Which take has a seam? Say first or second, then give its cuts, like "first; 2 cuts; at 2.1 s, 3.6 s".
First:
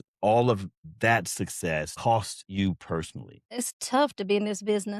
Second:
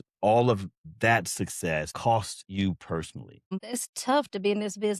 first; 1 cut; at 3.5 s